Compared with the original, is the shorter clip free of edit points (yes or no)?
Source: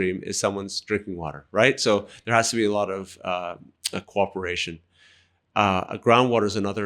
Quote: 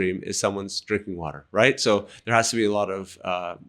yes